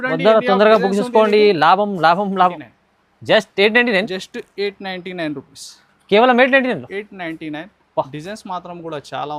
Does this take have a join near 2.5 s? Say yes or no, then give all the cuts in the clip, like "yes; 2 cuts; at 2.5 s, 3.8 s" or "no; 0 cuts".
yes; 1 cut; at 2.5 s